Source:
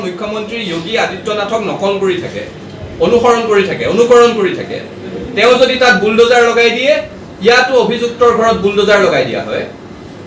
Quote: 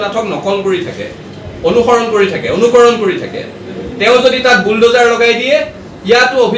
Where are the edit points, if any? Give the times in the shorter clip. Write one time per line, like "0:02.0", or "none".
none